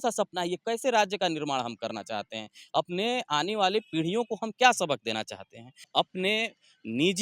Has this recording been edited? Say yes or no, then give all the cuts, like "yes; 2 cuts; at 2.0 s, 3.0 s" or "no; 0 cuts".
yes; 1 cut; at 5.9 s